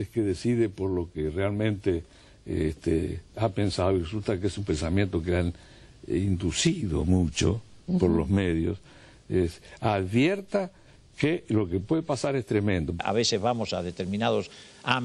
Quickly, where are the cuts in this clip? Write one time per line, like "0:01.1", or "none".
0:12.9